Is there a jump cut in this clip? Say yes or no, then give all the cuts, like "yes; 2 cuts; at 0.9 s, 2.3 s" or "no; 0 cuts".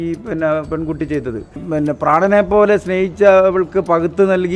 yes; 1 cut; at 1.6 s